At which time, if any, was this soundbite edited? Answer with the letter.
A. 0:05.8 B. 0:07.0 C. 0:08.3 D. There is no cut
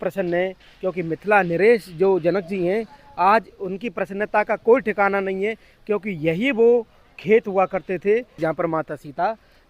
C